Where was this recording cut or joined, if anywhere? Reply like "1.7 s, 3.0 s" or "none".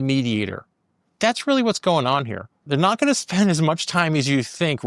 2.5 s